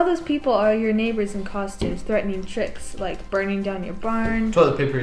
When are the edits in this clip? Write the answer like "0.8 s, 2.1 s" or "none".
none